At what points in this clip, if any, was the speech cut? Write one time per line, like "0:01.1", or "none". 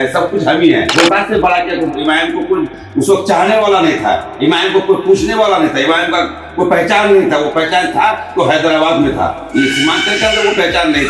0:00.9